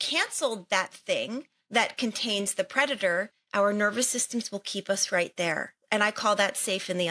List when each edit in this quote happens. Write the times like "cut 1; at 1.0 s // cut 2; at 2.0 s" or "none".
cut 1; at 3.4 s // cut 2; at 5.7 s